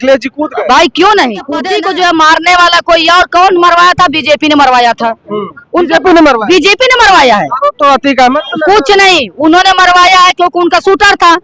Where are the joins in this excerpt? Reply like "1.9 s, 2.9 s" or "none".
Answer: 1.6 s